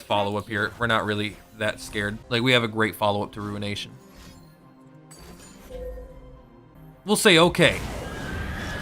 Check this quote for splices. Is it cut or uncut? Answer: cut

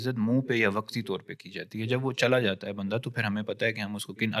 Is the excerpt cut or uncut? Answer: uncut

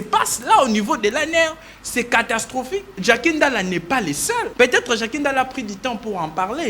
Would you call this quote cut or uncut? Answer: cut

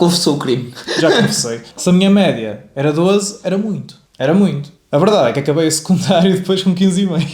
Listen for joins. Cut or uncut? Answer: cut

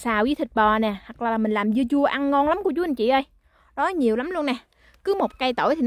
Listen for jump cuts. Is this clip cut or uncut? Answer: uncut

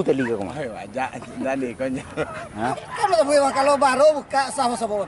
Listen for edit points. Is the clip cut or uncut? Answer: cut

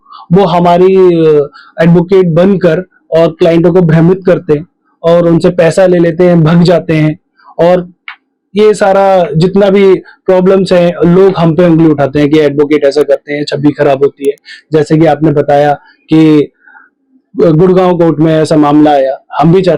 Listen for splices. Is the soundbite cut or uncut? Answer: uncut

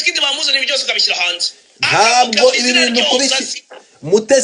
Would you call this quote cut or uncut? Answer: uncut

